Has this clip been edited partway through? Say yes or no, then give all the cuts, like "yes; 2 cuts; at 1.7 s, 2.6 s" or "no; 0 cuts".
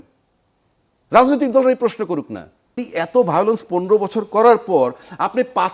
yes; 1 cut; at 2.8 s